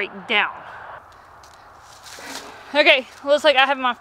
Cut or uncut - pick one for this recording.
cut